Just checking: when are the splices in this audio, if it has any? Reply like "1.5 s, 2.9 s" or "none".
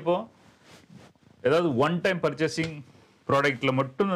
none